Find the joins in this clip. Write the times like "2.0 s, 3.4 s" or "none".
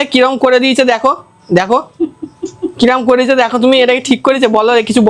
none